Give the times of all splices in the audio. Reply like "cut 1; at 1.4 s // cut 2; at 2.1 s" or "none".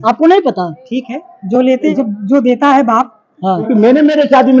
cut 1; at 1.9 s // cut 2; at 3.7 s

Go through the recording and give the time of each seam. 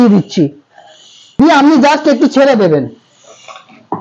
cut 1; at 1.4 s

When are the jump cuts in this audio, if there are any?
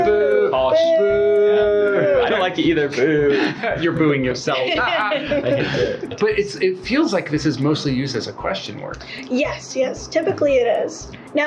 none

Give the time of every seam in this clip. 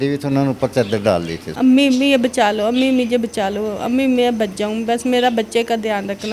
cut 1; at 1.4 s

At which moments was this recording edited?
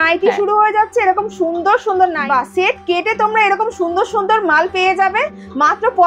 cut 1; at 2.2 s

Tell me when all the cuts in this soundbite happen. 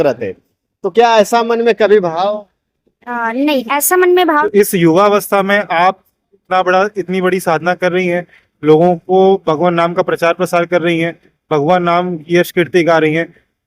cut 1; at 4.4 s

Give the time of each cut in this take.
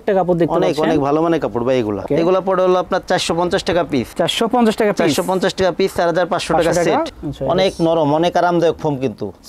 cut 1; at 2.0 s // cut 2; at 7.2 s

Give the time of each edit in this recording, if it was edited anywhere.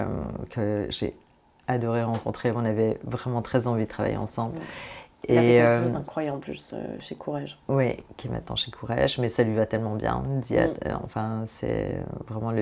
none

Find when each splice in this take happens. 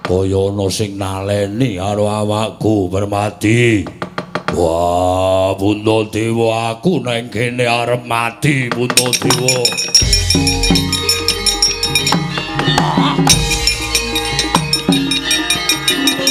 none

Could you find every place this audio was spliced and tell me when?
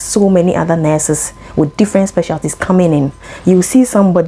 cut 1; at 3.2 s

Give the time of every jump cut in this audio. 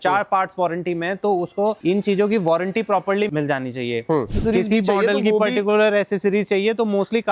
cut 1; at 1.8 s // cut 2; at 3.3 s // cut 3; at 4.3 s

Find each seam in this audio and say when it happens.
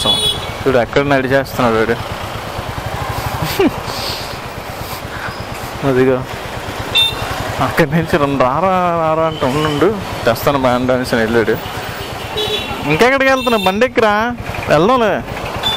none

